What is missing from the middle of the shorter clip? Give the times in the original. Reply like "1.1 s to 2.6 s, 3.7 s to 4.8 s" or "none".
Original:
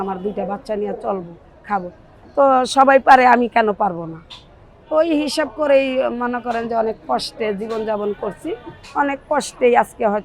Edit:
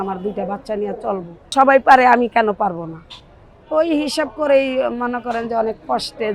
1.5 s to 2.7 s